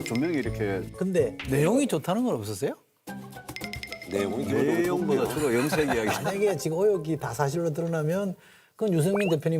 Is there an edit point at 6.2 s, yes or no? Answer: yes